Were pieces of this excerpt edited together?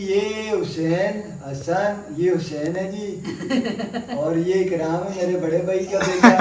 no; 0 cuts

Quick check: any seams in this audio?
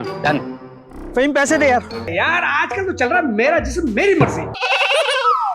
yes; 2 cuts; at 2.1 s, 4.5 s

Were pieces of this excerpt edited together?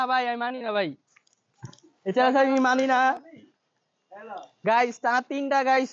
no; 0 cuts

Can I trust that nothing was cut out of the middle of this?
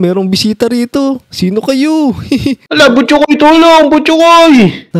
no; 1 cut; at 2.7 s

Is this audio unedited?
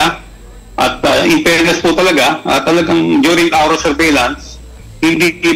yes; 0 cuts

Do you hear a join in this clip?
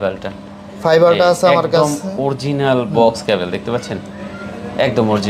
no; 0 cuts

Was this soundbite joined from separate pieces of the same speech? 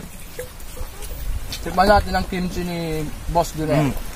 yes; 1 cut; at 1.1 s

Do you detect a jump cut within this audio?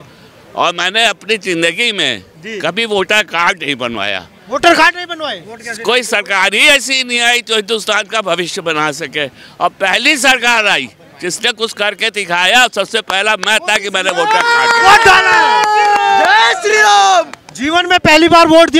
no; 0 cuts

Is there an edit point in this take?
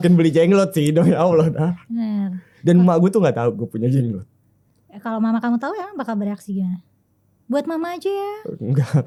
no; 0 cuts

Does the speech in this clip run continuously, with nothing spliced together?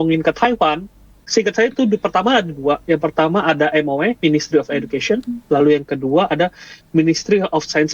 no; 1 cut; at 1.2 s

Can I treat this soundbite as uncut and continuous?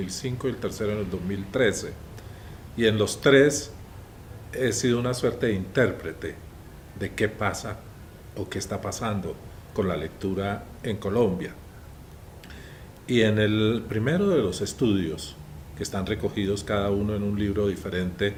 yes; 0 cuts

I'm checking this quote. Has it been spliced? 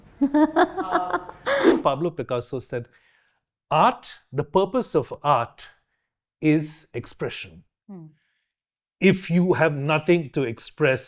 yes; 1 cut; at 1.7 s

